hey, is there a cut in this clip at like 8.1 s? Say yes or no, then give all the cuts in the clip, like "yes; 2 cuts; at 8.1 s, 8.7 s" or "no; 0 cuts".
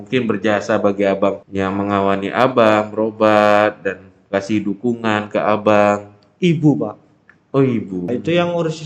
yes; 2 cuts; at 1.4 s, 8.1 s